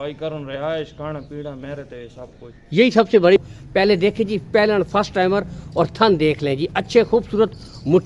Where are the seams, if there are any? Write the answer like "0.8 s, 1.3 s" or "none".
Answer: 3.4 s